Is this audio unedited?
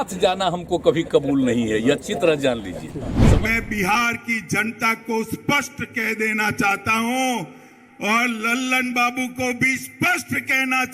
no; 1 cut; at 3.1 s

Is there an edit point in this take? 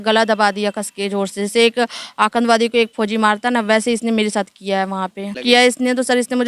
yes; 1 cut; at 5.4 s

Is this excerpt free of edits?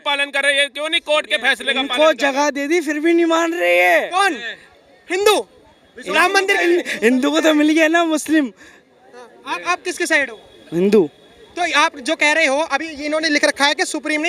yes; 0 cuts

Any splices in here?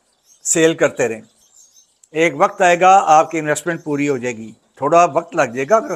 no; 0 cuts

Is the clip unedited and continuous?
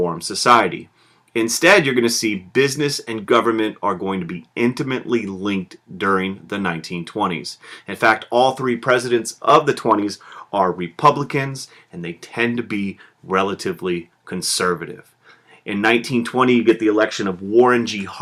yes; 0 cuts

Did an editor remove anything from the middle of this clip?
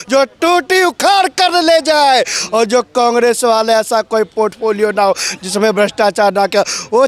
no; 0 cuts

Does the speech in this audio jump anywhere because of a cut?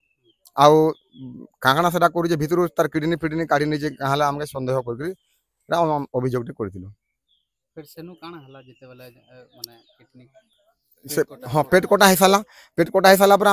no; 0 cuts

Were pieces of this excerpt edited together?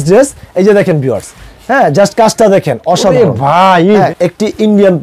yes; 1 cut; at 4.1 s

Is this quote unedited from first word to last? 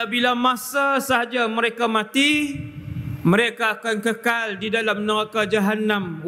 yes; 0 cuts

